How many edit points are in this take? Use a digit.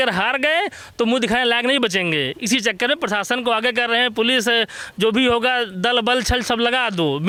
0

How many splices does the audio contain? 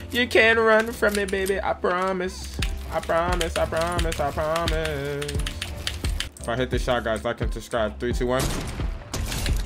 1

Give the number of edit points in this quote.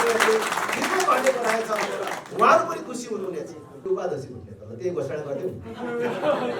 1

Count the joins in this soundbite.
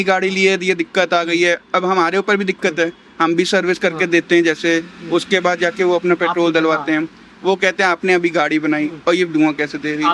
0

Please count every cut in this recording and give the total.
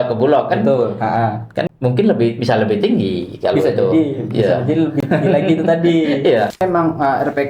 1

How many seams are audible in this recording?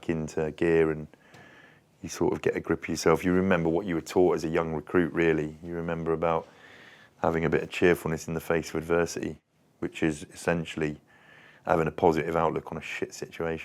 0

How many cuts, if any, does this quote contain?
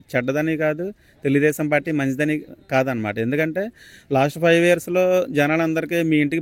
0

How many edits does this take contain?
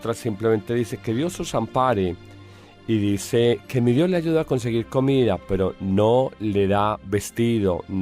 1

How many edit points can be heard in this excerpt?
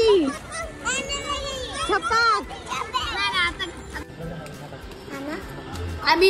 1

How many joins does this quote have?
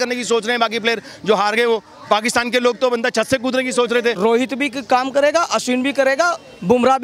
1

